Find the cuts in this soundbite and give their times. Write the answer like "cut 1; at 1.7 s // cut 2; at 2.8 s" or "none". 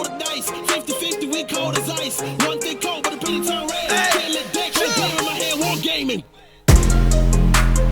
cut 1; at 6.1 s